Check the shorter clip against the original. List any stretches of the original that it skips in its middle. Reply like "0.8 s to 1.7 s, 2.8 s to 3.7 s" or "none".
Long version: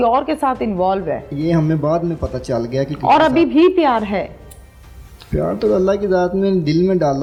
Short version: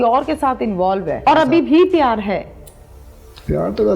1.3 s to 3.1 s